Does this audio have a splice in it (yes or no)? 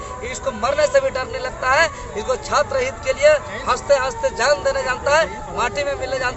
no